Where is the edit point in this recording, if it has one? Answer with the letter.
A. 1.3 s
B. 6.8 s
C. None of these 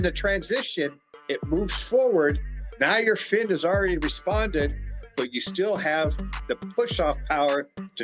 C